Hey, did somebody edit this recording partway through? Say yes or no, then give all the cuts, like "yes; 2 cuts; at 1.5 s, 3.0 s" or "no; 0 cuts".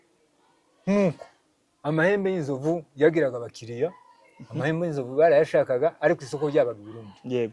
no; 0 cuts